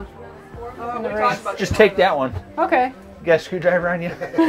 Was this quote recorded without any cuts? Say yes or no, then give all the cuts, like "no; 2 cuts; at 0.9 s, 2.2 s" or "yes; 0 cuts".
yes; 0 cuts